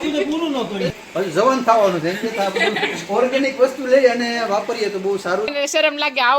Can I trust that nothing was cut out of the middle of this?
no; 2 cuts; at 0.9 s, 5.5 s

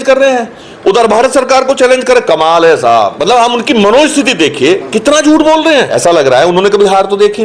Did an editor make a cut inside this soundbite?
yes; 2 cuts; at 3.2 s, 5.9 s

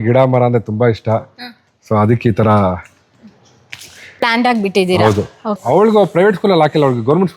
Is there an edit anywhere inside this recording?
yes; 1 cut; at 5.6 s

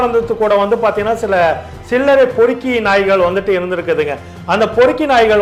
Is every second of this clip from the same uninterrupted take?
yes; 0 cuts

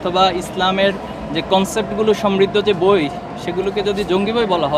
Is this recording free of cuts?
yes; 0 cuts

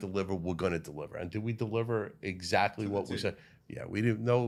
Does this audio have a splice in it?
no; 0 cuts

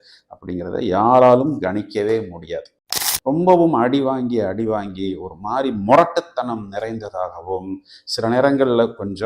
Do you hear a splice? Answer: yes; 1 cut; at 2.8 s

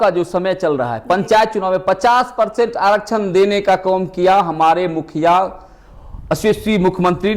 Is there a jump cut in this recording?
no; 0 cuts

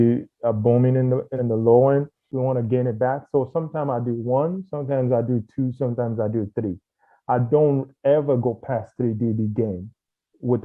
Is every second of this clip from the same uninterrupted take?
no; 2 cuts; at 1.3 s, 2.3 s

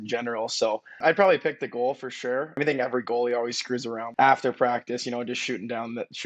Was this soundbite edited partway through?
yes; 3 cuts; at 0.9 s, 2.6 s, 4.0 s

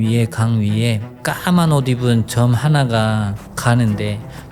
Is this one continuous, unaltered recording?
no; 1 cut; at 1.1 s

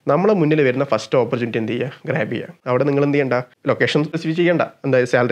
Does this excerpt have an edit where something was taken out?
yes; 2 cuts; at 2.6 s, 4.1 s

